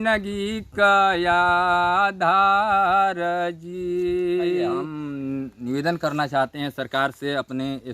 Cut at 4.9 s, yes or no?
yes